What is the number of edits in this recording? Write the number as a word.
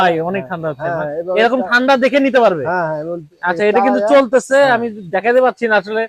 zero